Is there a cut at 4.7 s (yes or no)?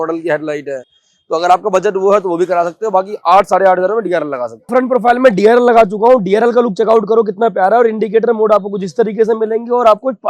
yes